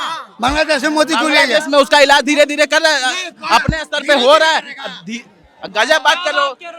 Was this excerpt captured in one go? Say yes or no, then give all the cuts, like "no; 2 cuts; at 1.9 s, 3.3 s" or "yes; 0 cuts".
yes; 0 cuts